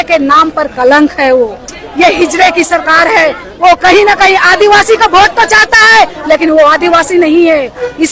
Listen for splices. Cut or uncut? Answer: cut